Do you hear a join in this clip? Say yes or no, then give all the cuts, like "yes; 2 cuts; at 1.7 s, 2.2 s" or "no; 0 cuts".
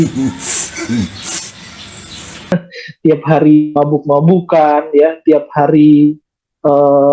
yes; 1 cut; at 2.5 s